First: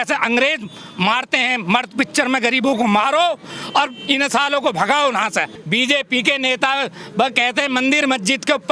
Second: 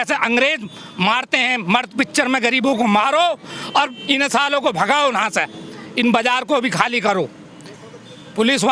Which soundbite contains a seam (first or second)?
first